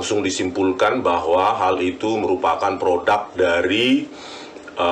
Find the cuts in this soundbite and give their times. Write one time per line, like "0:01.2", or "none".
none